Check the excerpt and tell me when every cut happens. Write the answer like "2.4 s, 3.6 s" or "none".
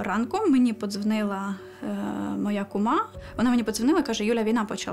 3.2 s